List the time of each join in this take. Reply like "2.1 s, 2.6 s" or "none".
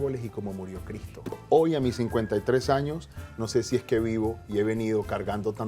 1.3 s